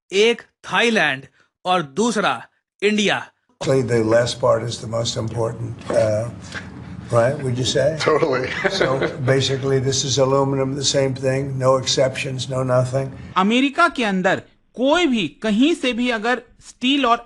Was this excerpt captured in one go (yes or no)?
no